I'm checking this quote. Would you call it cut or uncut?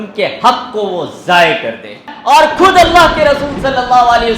cut